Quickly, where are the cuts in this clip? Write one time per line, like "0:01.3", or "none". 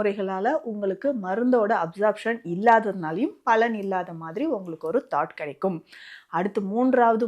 none